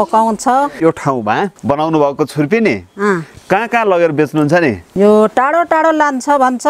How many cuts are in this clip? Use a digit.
3